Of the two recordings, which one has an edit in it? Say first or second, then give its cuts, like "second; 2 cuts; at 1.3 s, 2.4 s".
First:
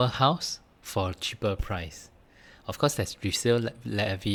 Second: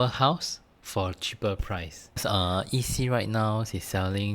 second; 1 cut; at 2.2 s